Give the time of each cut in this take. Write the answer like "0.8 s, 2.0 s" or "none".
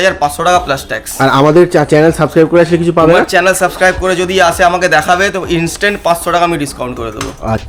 none